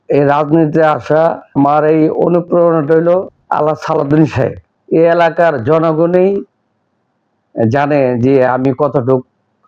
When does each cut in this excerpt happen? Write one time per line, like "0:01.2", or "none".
0:04.6

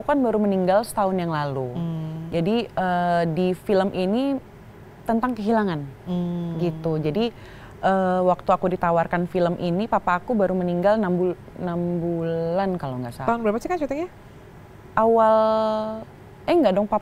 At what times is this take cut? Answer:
none

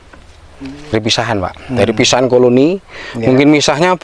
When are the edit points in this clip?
0:00.9

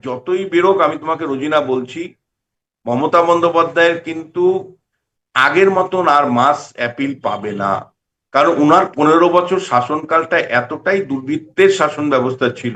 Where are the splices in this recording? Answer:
none

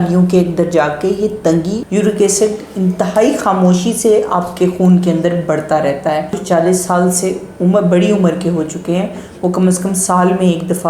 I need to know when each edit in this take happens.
0:01.8
0:06.4

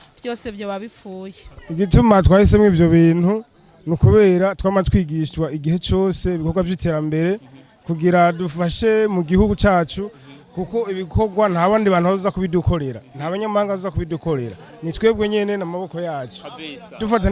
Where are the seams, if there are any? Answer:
0:01.6

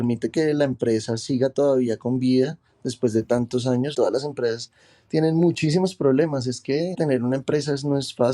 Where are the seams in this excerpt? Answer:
0:03.9
0:07.0

